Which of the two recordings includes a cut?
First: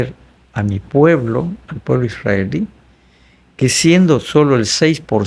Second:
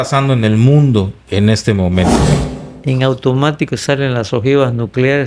second; 1 cut; at 2.2 s

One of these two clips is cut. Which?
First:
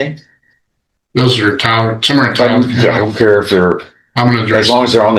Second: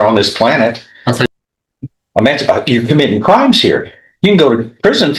second; 1 cut; at 1.3 s

